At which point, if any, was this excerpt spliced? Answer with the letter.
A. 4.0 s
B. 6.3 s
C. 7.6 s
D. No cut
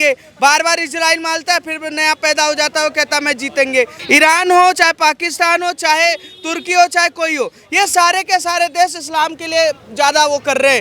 A